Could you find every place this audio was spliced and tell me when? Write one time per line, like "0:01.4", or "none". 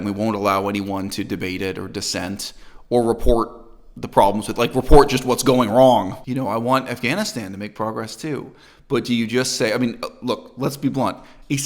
0:06.2